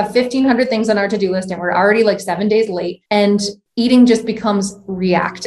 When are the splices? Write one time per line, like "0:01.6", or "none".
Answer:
0:03.4